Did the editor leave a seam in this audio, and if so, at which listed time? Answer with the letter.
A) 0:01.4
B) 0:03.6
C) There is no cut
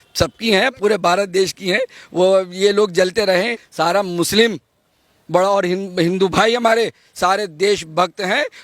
B